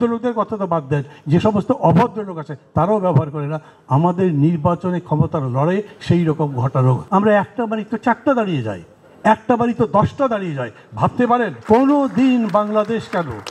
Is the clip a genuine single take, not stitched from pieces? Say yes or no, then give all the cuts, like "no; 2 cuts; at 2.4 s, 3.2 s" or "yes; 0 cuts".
no; 2 cuts; at 7.0 s, 11.6 s